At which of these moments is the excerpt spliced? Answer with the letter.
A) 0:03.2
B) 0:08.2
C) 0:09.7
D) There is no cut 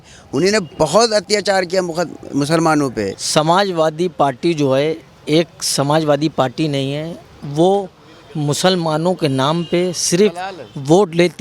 A